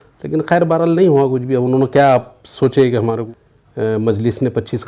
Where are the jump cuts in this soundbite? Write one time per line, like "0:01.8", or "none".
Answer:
0:03.2